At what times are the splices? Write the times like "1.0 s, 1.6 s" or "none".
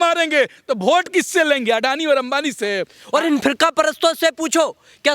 2.9 s